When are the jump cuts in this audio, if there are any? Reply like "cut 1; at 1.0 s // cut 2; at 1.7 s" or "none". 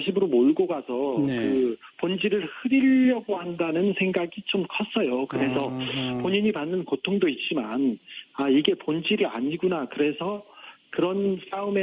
cut 1; at 5.8 s